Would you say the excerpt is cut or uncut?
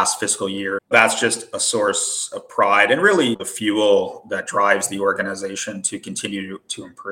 cut